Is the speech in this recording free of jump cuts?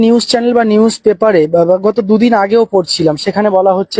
yes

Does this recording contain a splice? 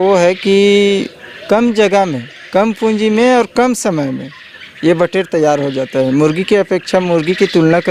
no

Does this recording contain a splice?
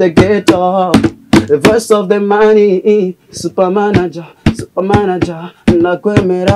no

